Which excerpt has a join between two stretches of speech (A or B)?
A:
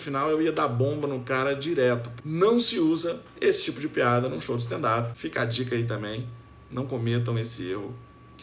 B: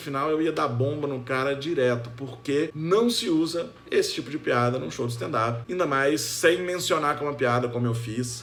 A